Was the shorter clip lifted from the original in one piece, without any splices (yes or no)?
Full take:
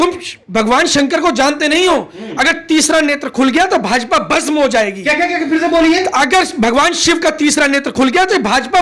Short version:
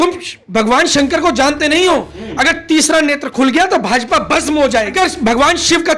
no